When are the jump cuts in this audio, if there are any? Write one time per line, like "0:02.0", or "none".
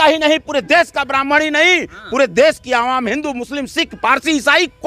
none